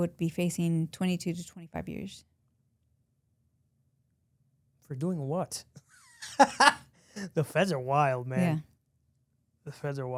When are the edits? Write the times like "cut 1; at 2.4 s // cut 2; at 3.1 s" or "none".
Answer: none